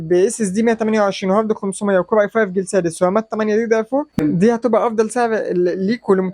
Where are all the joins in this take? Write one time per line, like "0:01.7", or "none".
0:04.2

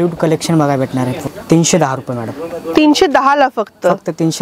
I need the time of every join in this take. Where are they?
0:01.2

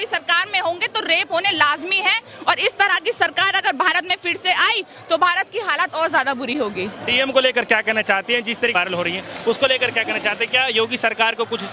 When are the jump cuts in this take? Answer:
none

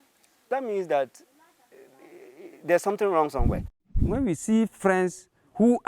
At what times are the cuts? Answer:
0:03.9

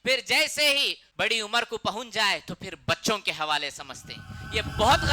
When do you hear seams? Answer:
0:01.0

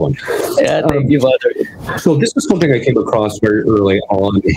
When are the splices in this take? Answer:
none

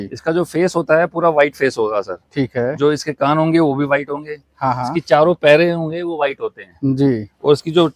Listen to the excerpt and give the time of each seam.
none

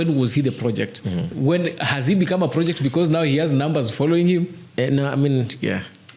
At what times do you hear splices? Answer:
none

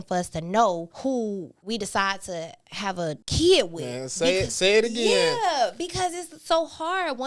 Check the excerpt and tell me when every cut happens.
0:01.3
0:03.2

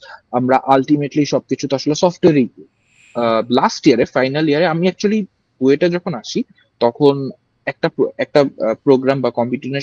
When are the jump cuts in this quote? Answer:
0:03.0

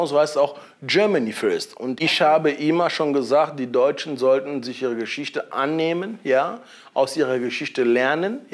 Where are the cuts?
0:02.1

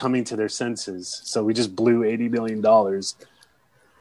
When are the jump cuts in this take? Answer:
none

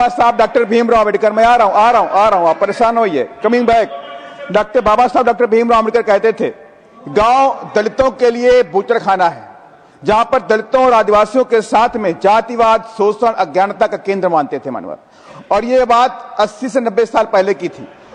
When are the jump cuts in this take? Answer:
none

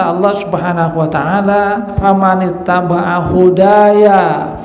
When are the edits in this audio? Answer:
0:02.0

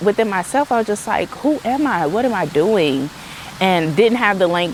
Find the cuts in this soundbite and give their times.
none

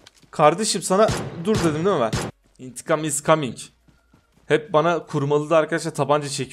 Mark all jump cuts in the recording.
0:02.3

